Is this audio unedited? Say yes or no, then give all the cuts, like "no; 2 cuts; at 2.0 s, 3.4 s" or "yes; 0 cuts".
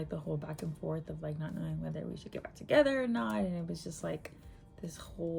yes; 0 cuts